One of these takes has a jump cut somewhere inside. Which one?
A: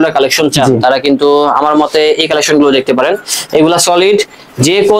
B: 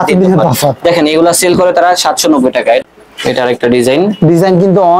B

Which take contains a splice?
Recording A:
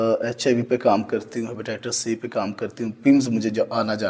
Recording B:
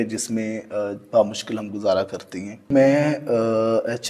B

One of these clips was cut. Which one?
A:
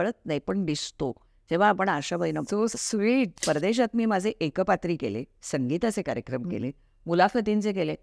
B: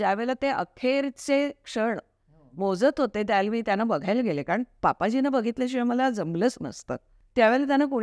A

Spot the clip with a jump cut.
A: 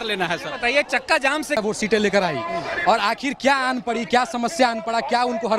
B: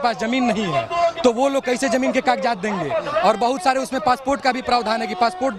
A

